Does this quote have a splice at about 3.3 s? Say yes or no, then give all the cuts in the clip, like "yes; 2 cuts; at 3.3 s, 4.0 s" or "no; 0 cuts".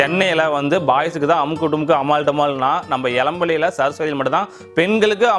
no; 0 cuts